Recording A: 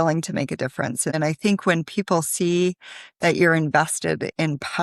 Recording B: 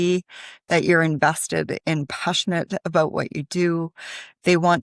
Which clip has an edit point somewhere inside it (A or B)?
A